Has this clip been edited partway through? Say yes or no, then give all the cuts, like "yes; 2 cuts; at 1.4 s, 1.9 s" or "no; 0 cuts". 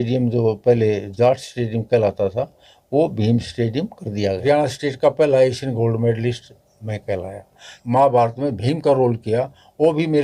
yes; 2 cuts; at 4.4 s, 7.7 s